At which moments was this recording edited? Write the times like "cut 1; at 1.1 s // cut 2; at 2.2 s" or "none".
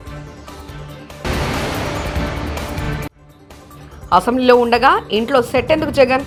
none